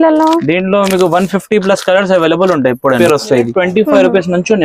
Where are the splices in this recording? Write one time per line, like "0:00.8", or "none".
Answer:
0:03.4